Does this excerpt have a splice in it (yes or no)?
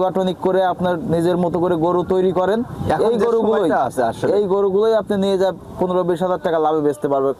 no